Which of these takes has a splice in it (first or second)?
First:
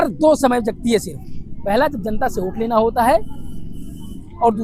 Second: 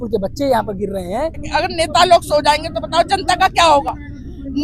second